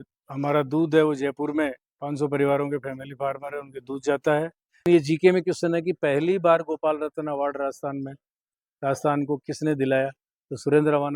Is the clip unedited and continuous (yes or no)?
no